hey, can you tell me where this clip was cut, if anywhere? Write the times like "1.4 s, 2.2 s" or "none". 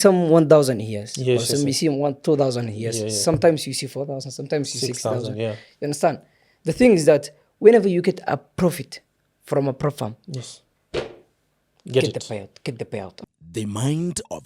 13.2 s